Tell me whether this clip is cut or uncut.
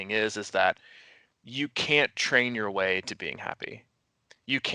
uncut